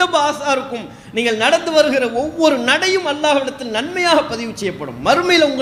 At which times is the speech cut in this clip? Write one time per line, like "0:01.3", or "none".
none